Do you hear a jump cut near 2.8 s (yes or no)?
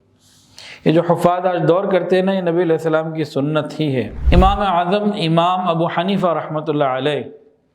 no